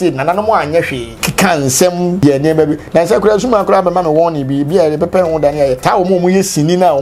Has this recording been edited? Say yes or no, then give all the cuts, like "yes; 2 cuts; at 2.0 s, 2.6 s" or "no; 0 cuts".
yes; 3 cuts; at 1.1 s, 2.2 s, 5.8 s